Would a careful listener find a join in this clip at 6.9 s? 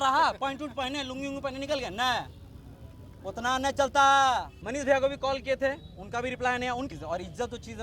yes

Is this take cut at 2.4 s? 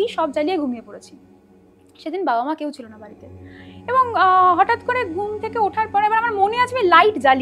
no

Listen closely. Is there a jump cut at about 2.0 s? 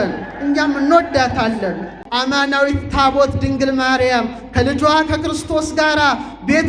yes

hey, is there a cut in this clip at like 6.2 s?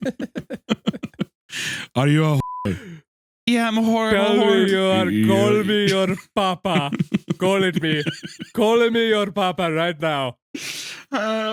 no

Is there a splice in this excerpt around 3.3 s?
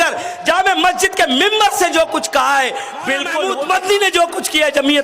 yes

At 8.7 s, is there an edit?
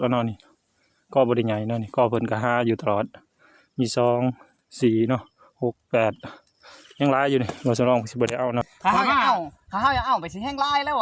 yes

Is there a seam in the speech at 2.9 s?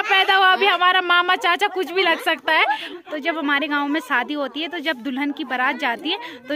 yes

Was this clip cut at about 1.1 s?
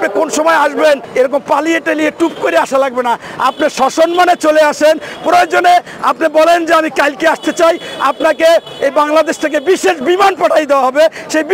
yes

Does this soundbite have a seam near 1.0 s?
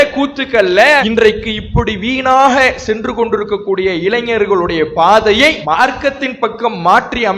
yes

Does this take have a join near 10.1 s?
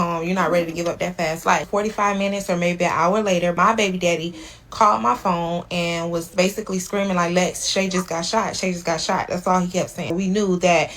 yes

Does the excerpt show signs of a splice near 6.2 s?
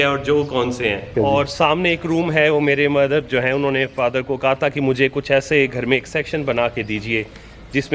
no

